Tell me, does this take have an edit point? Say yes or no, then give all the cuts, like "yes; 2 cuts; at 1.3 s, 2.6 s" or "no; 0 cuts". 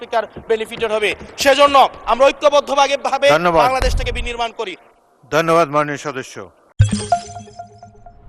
no; 0 cuts